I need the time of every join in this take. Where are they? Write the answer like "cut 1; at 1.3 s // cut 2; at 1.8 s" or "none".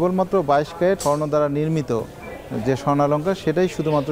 cut 1; at 1.0 s